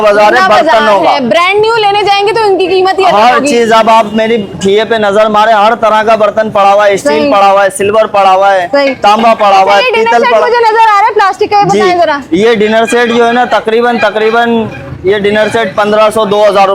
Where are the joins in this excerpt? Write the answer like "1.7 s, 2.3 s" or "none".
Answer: none